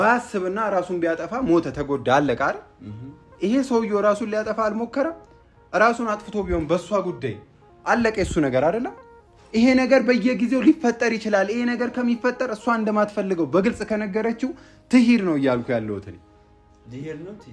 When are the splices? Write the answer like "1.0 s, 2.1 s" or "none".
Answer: none